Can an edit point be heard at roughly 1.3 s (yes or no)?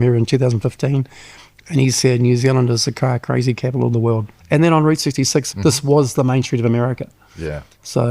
no